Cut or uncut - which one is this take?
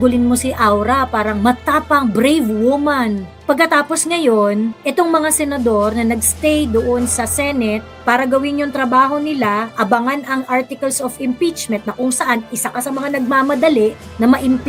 uncut